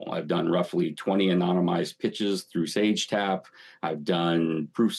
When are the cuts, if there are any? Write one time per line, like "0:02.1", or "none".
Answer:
none